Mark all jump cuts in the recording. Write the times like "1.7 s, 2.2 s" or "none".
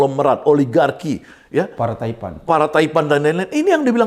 none